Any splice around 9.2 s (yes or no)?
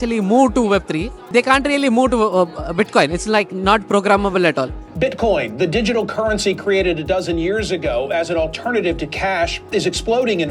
no